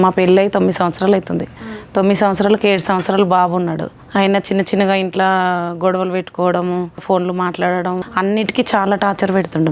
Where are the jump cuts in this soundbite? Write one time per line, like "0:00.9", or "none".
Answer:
0:03.9
0:07.0
0:08.1